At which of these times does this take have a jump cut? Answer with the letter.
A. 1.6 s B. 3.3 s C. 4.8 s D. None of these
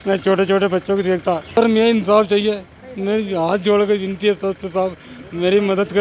A